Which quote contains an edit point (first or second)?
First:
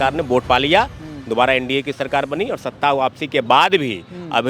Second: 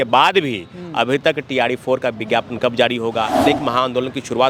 second